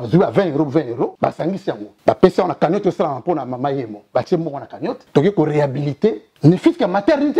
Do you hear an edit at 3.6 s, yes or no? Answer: no